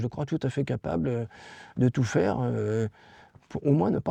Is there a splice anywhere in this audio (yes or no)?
no